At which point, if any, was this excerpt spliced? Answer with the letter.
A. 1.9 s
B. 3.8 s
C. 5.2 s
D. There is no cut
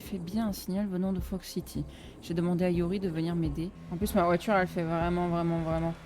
B